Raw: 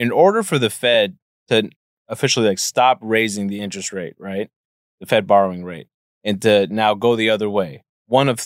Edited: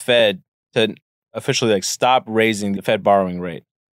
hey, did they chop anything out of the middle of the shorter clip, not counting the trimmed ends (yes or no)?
yes